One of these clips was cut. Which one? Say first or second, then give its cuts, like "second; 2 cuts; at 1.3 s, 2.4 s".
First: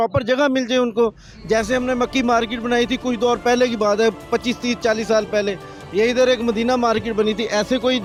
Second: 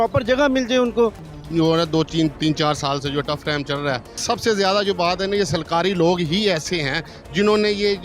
second; 2 cuts; at 1.3 s, 4.2 s